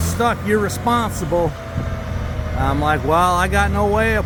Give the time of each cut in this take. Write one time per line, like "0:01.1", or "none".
none